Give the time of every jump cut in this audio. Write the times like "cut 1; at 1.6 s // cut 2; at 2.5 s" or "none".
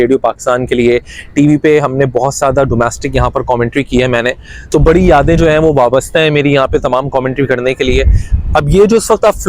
none